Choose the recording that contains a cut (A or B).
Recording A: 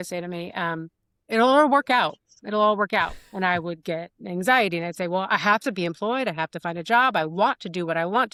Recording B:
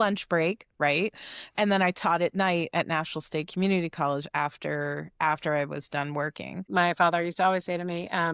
B